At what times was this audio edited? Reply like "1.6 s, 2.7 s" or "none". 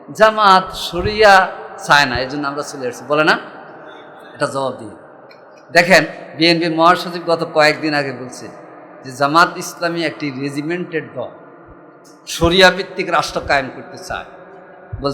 1.7 s, 6.2 s